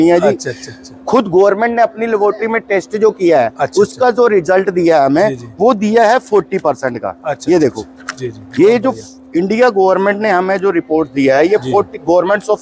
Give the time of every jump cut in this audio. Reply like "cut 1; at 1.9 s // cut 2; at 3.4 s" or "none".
none